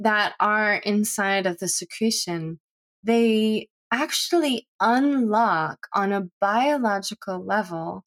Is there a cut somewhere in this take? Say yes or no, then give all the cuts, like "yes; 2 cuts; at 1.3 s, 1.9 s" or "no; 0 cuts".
no; 0 cuts